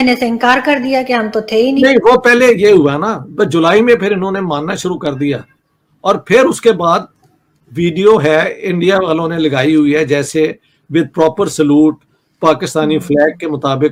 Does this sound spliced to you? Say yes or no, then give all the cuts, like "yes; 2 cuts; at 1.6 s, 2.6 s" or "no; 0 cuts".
no; 0 cuts